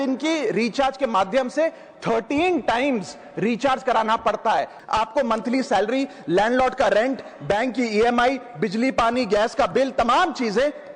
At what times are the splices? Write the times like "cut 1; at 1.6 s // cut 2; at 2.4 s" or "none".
cut 1; at 4.8 s